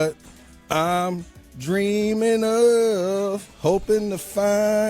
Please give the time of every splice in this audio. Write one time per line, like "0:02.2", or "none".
none